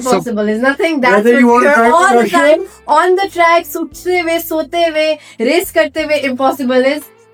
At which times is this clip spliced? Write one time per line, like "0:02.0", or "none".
none